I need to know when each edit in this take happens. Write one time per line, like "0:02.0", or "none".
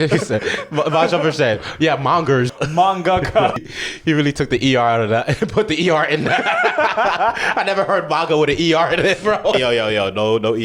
0:02.5
0:03.6
0:09.5